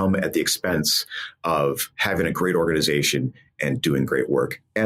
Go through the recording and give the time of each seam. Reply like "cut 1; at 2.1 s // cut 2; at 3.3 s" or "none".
cut 1; at 1.9 s